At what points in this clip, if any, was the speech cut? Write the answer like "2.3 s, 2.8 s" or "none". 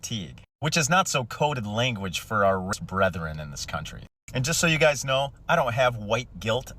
2.7 s

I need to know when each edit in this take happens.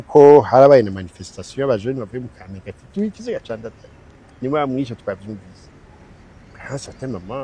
none

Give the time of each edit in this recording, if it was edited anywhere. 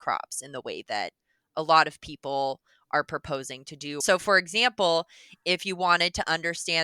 4.0 s

